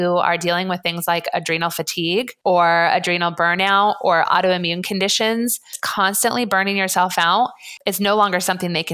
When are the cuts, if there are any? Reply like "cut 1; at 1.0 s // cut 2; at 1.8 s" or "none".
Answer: cut 1; at 2.3 s // cut 2; at 5.8 s // cut 3; at 7.7 s